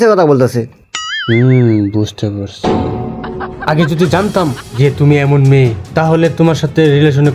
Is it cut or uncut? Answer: uncut